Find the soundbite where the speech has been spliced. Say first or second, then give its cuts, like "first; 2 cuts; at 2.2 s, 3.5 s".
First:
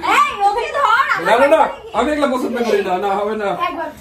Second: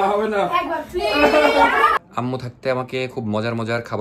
second; 1 cut; at 2.0 s